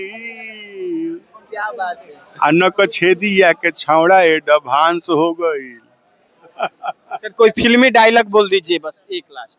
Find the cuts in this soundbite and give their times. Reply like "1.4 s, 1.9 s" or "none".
none